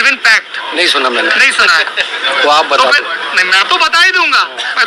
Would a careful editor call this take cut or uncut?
cut